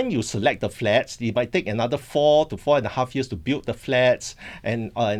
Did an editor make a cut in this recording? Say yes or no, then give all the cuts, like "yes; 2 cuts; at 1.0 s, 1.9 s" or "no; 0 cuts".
no; 0 cuts